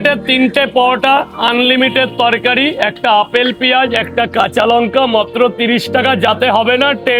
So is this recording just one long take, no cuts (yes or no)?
yes